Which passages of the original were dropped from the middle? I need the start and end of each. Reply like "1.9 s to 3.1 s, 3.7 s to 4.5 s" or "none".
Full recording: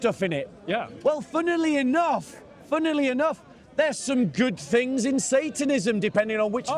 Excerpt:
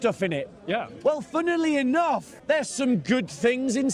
2.3 s to 3.6 s